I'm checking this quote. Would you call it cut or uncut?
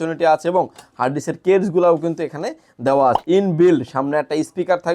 cut